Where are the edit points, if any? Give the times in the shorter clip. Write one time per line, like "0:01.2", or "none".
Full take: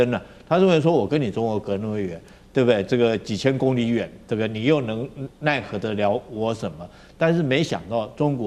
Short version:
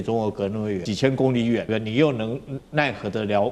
0:00.9
0:01.7